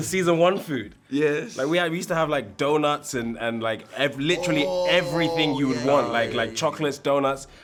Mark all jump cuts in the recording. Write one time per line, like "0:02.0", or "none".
none